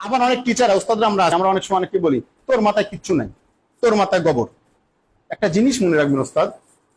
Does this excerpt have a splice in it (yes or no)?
yes